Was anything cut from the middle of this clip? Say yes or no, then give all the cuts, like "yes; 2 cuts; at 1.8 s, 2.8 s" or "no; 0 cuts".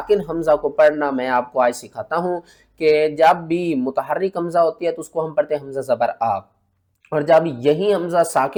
no; 0 cuts